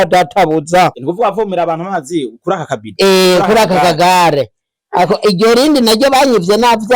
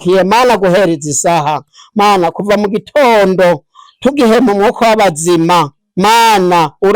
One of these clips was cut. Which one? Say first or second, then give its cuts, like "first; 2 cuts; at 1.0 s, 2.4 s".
first; 1 cut; at 1.0 s